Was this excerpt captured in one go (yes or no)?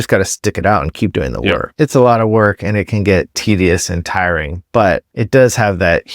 no